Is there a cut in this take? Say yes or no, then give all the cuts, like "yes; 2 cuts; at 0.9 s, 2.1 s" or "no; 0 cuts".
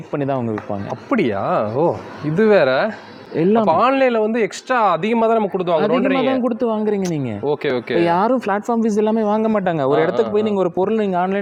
no; 0 cuts